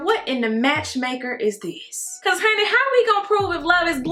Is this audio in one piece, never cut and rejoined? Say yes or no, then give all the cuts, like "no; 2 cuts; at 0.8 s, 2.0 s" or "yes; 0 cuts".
yes; 0 cuts